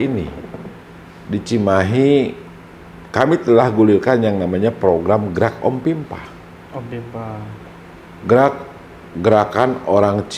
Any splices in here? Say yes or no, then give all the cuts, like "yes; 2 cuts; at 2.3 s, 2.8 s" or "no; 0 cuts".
no; 0 cuts